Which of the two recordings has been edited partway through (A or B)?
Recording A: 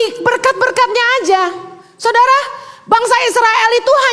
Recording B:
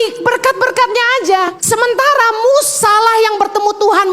B